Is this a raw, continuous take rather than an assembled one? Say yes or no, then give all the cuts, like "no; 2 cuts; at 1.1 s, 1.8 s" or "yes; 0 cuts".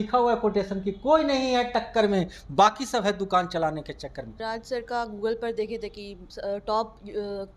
no; 1 cut; at 4.3 s